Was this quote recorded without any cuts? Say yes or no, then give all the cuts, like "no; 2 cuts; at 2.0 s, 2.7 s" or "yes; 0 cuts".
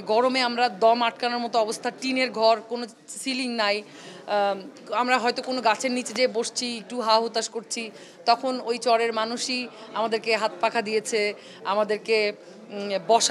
yes; 0 cuts